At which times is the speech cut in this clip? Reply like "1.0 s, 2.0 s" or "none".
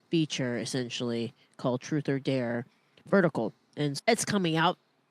4.0 s